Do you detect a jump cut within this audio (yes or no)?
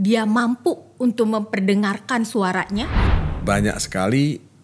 yes